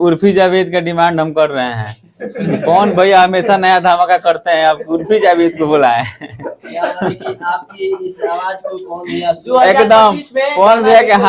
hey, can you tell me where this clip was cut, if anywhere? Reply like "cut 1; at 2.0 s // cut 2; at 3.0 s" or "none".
none